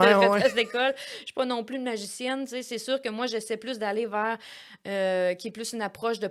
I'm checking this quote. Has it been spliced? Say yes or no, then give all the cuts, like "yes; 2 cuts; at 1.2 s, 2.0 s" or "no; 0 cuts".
no; 0 cuts